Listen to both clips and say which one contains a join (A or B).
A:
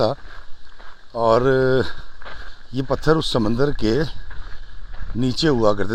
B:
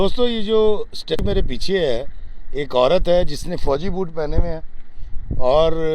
B